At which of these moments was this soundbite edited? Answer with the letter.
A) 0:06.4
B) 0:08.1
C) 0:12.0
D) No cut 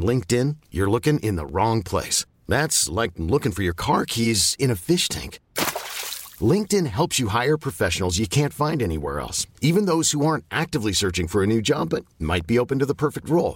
D